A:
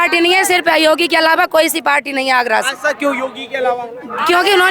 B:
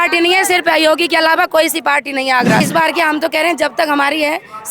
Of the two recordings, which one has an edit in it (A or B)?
B